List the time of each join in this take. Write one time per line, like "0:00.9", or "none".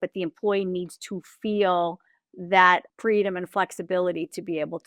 0:02.9